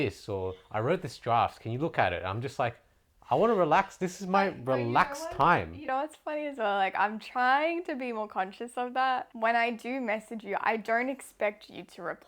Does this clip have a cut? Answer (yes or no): yes